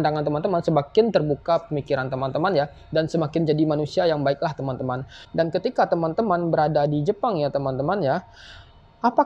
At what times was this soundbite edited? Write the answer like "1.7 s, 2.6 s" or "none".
5.1 s